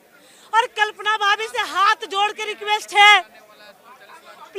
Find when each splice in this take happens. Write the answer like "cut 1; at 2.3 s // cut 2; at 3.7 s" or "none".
none